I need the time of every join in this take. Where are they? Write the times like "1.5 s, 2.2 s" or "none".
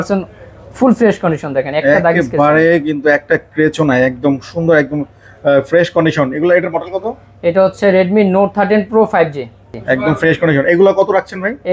none